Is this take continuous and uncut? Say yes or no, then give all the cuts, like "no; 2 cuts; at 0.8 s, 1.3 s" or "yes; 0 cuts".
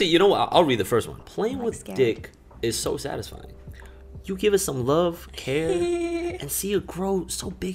yes; 0 cuts